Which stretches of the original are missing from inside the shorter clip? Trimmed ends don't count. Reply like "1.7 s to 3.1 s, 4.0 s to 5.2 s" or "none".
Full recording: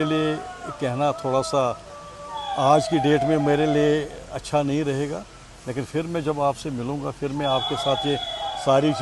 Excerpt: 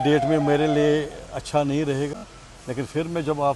none